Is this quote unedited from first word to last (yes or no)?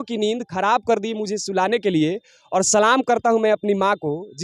yes